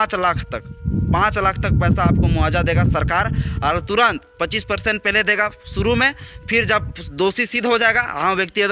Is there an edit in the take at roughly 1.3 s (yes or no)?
no